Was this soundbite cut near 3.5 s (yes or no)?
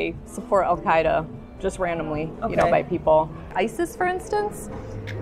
yes